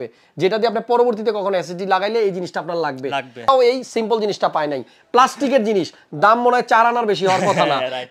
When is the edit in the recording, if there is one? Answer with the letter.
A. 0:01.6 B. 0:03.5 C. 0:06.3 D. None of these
B